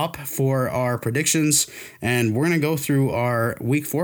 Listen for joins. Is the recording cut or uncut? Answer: uncut